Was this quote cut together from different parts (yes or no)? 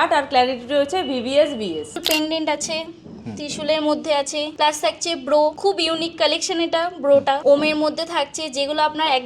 yes